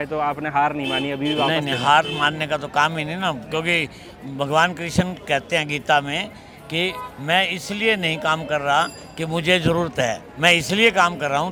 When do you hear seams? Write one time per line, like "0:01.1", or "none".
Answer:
none